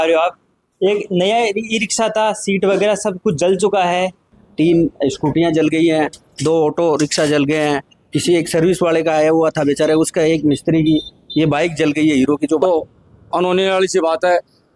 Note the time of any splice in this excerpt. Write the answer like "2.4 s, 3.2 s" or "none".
4.4 s, 12.6 s